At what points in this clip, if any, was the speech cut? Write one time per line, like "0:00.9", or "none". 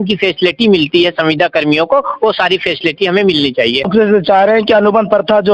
0:03.9